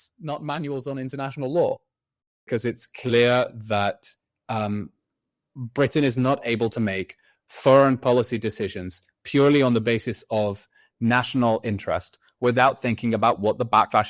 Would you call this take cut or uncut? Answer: cut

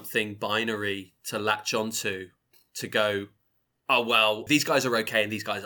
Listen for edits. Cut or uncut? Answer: cut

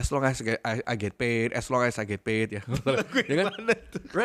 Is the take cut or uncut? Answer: uncut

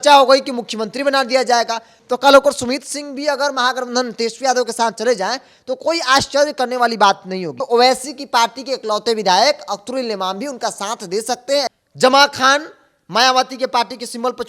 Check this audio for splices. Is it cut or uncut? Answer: cut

